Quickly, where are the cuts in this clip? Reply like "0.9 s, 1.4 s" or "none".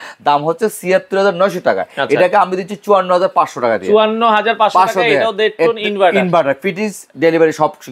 none